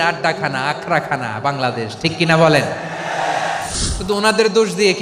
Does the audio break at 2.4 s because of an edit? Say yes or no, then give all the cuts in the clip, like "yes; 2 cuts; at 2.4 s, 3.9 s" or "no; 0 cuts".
no; 1 cut; at 3.8 s